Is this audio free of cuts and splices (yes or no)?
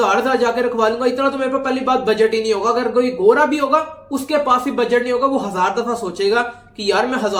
yes